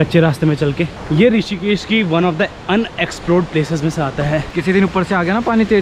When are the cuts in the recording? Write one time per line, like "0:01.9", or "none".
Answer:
0:01.0
0:04.5